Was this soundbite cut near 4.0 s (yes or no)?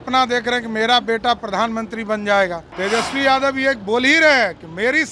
no